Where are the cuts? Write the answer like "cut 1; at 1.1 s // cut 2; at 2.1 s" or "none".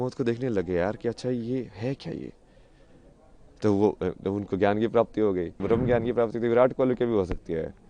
cut 1; at 5.6 s